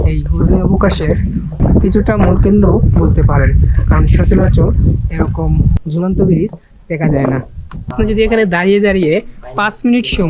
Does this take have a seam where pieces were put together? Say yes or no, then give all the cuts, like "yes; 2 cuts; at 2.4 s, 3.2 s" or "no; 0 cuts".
yes; 1 cut; at 7.9 s